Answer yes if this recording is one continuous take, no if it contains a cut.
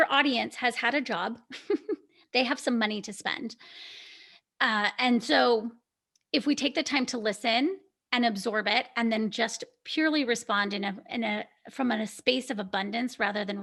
yes